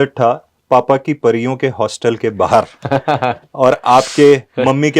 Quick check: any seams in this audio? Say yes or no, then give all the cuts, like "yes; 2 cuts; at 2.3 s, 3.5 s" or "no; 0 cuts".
no; 0 cuts